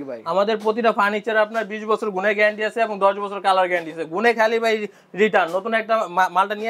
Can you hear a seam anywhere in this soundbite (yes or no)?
no